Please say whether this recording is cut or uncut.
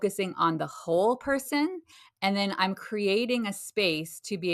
uncut